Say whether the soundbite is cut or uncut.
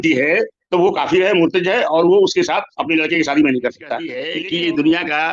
cut